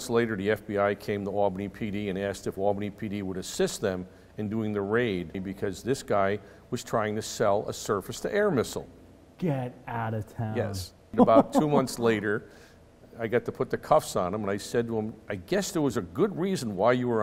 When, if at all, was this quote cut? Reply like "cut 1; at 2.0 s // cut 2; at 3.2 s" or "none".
cut 1; at 5.4 s // cut 2; at 11.1 s

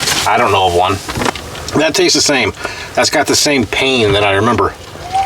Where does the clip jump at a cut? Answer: cut 1; at 1.3 s

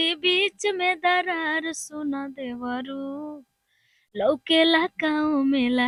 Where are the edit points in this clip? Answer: none

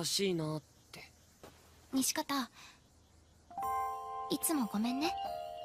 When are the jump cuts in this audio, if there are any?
none

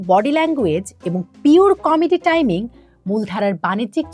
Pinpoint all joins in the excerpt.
none

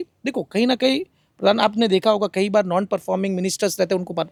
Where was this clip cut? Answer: none

